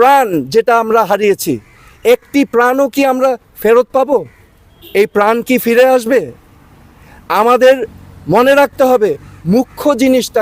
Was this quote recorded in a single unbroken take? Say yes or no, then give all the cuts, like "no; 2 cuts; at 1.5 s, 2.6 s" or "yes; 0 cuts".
yes; 0 cuts